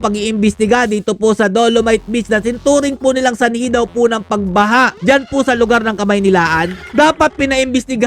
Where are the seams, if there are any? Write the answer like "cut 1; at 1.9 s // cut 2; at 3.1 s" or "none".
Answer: cut 1; at 6.8 s